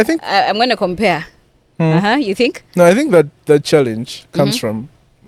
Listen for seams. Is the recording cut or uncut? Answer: uncut